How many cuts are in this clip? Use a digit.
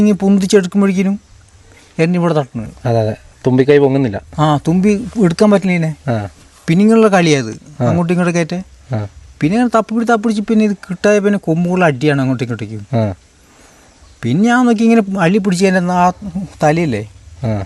0